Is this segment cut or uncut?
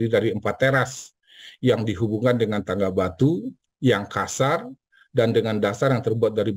uncut